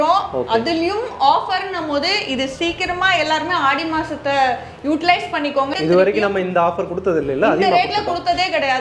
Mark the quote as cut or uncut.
cut